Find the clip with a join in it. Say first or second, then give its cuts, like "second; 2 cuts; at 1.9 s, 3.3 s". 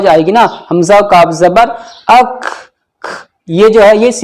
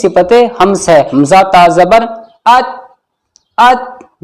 second; 1 cut; at 1.1 s